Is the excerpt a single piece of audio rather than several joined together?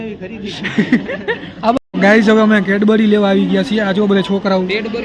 no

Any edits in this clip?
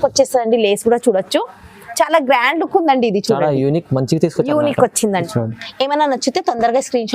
yes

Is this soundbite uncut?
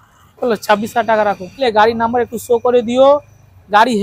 no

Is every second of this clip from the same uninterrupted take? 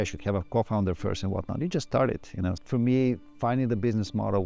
no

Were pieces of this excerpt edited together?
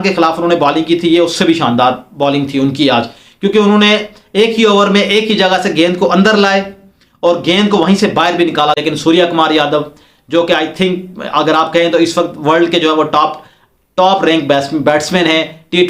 yes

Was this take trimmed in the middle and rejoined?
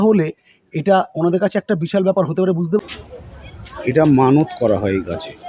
yes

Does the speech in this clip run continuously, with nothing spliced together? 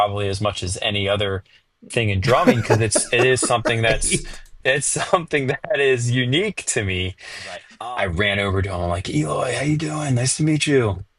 no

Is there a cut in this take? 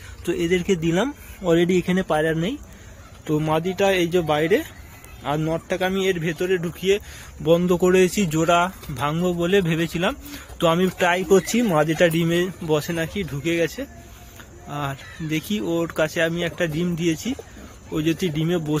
no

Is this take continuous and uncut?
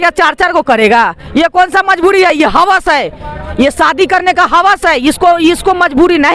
yes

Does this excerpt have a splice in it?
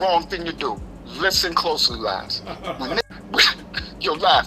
yes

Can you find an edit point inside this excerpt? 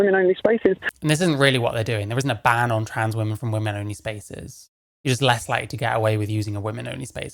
no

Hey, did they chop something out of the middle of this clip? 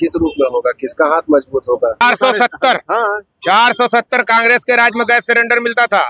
yes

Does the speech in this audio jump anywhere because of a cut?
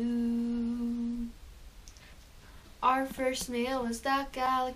yes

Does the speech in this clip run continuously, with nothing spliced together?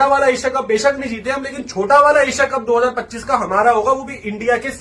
yes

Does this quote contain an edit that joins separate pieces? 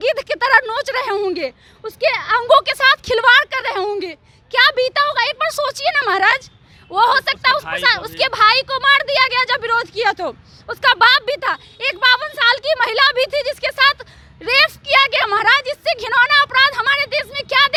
no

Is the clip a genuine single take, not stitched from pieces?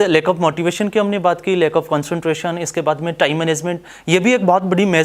yes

